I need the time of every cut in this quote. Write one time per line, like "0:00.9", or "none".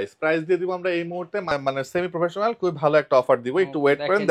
0:01.5